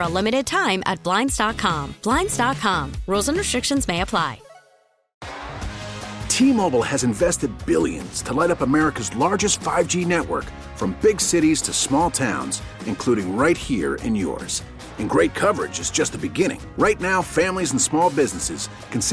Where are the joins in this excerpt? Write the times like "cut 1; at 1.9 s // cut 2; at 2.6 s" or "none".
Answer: cut 1; at 5.1 s